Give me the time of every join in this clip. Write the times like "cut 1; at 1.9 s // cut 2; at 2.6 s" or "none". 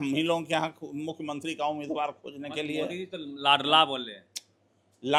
none

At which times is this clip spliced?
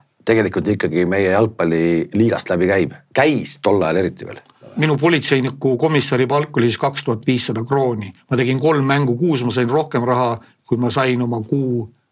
cut 1; at 4.7 s

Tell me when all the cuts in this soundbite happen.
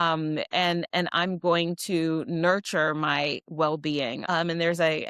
cut 1; at 4.2 s

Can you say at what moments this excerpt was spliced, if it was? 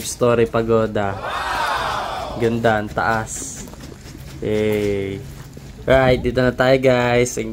none

